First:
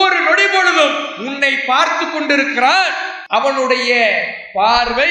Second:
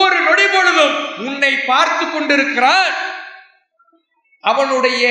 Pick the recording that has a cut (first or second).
first